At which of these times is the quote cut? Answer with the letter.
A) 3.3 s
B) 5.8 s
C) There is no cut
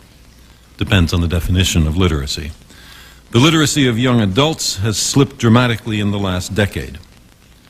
A